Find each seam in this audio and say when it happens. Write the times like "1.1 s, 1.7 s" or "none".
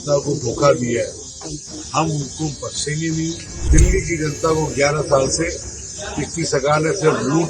3.6 s